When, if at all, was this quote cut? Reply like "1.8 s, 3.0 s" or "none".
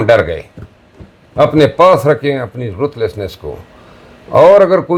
none